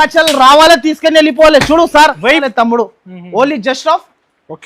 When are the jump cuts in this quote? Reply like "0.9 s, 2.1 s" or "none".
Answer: 2.4 s